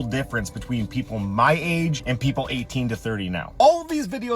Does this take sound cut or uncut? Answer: cut